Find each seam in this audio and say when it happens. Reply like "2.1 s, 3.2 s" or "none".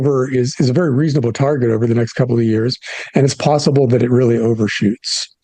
none